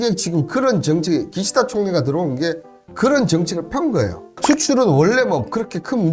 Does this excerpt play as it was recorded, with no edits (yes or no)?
no